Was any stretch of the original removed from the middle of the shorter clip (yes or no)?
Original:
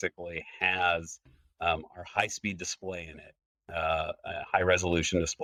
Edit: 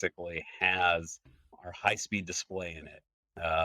yes